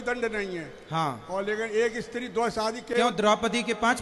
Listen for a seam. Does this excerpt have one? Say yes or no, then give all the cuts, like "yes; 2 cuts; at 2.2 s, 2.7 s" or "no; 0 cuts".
no; 0 cuts